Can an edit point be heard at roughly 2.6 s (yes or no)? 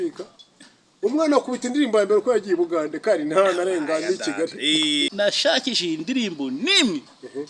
no